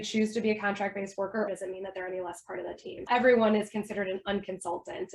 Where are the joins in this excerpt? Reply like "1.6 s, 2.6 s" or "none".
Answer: 1.5 s, 3.1 s